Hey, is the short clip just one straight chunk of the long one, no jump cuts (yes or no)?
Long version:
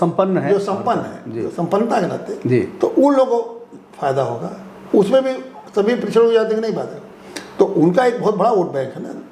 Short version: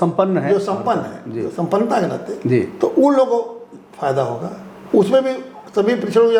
yes